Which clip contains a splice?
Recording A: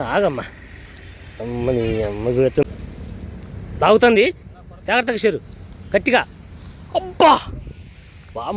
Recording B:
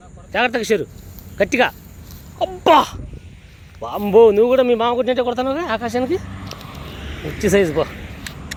A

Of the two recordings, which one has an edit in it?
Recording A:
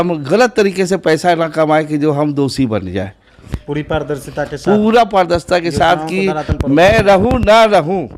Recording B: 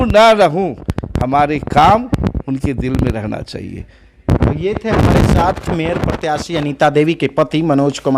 A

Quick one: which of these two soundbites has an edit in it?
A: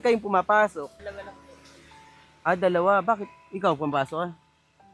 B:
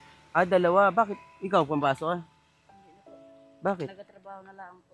A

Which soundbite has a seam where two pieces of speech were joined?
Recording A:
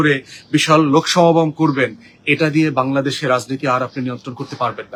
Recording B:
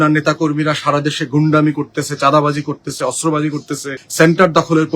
B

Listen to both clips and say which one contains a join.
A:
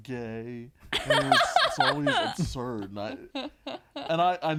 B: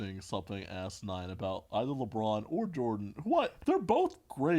B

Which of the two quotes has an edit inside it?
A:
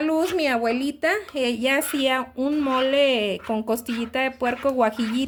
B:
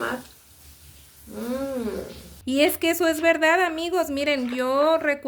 B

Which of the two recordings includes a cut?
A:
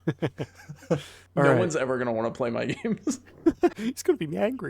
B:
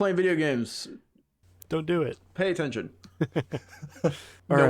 A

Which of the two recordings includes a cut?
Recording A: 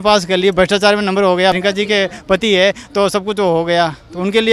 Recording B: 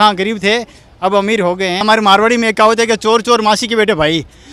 B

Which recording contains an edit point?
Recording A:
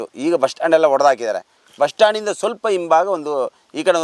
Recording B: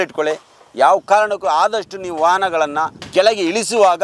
B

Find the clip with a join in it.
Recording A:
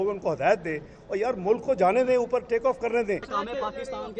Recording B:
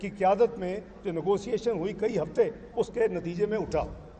A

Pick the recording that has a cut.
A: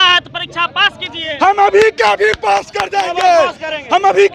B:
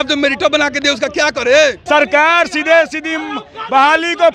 B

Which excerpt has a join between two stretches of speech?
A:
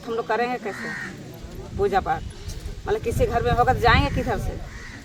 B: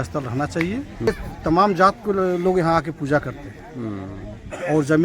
B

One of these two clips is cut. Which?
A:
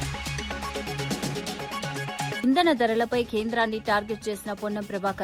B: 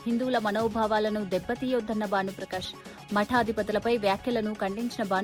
A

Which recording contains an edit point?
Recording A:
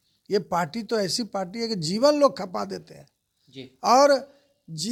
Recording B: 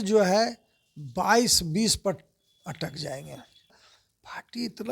B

